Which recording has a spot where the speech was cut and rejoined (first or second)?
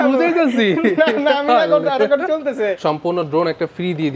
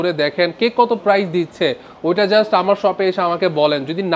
first